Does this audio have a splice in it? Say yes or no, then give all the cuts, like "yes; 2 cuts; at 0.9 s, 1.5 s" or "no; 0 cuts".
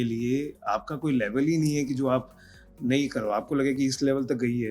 no; 0 cuts